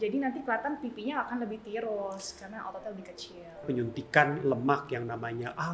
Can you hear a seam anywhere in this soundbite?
yes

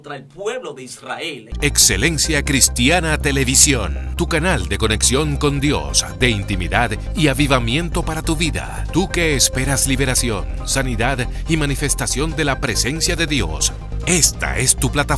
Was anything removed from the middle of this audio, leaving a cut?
yes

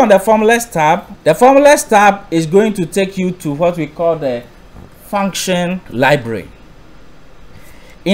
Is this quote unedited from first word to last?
no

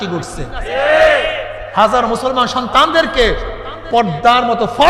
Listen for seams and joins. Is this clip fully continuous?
yes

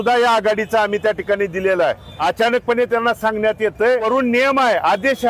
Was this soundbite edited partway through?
yes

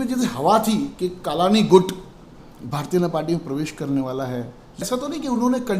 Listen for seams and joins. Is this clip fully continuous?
no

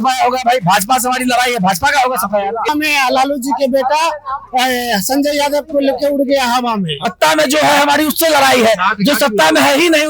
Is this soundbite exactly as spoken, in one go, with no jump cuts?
no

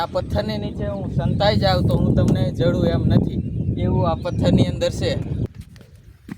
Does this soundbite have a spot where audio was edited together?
yes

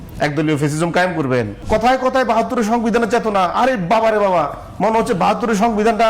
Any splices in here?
yes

